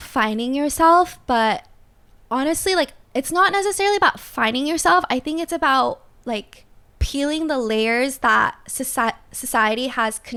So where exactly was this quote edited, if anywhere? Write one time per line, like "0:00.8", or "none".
none